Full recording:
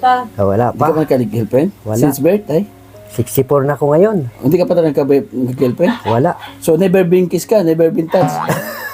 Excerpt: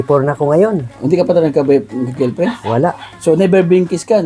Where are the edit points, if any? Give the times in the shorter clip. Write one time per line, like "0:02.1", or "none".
none